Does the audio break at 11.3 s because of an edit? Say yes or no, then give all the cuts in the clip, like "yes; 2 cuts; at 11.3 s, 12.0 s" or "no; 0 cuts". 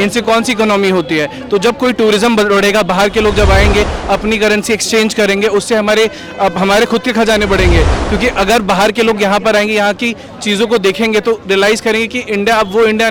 no; 0 cuts